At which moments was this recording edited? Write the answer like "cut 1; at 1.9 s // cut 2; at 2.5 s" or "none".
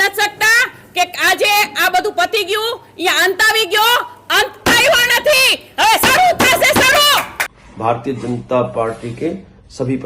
cut 1; at 7.4 s